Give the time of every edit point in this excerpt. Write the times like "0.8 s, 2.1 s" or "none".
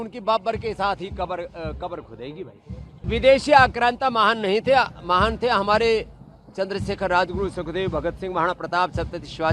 3.0 s